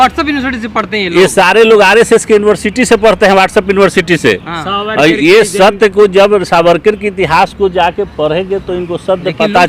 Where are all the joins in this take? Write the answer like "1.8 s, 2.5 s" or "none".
none